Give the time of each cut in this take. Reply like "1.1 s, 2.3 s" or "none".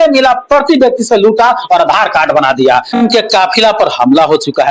3.0 s